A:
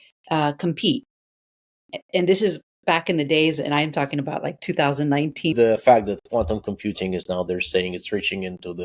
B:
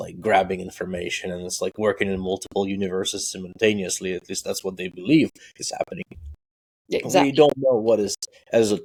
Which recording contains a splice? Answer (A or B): A